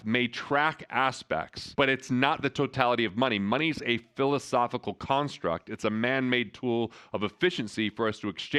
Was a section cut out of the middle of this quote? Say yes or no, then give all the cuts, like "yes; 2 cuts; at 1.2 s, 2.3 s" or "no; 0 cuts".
no; 0 cuts